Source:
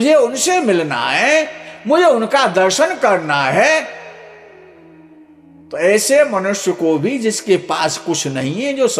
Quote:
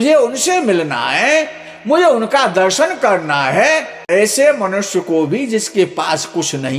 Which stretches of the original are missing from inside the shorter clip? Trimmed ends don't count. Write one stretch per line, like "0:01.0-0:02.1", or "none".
0:04.0-0:05.7

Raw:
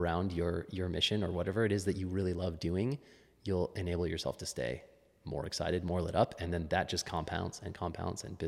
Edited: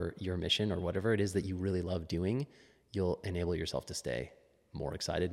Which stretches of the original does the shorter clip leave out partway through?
none

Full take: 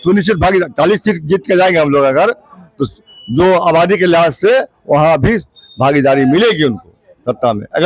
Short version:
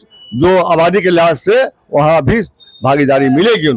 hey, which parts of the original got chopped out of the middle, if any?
none

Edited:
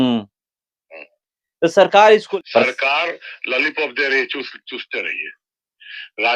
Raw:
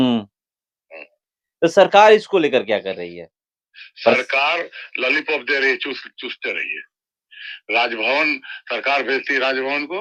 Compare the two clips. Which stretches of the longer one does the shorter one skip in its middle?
0:02.3-0:03.8

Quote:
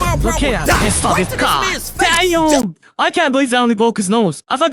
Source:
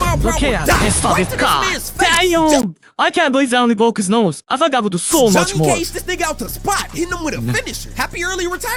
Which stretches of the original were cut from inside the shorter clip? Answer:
none

